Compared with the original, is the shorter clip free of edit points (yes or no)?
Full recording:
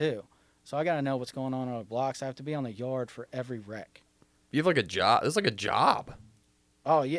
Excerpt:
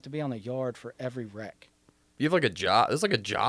yes